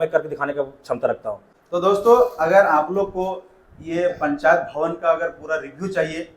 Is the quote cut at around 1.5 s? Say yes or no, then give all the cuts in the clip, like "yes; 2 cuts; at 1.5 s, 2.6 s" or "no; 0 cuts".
yes; 1 cut; at 1.5 s